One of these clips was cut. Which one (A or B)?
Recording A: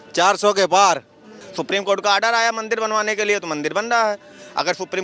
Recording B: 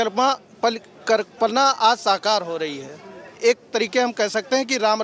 A